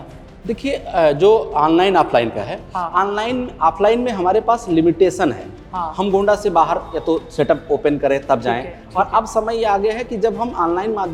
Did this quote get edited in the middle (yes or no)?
no